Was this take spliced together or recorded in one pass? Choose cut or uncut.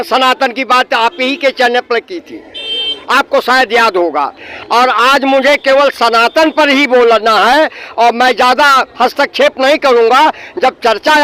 uncut